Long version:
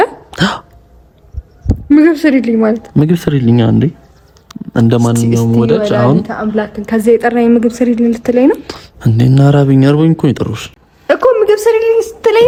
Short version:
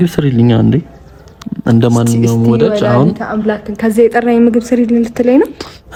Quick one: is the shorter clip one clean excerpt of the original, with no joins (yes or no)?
yes